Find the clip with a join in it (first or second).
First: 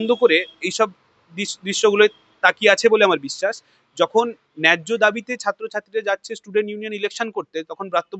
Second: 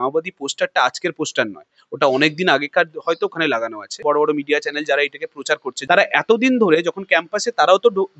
second